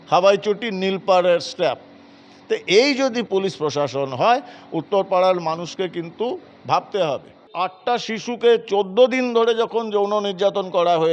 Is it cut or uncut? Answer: cut